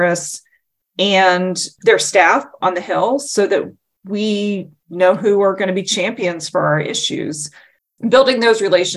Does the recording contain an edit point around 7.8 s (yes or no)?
yes